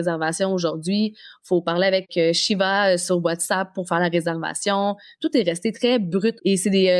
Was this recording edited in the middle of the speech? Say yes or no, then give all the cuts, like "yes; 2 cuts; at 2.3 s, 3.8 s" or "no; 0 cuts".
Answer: no; 0 cuts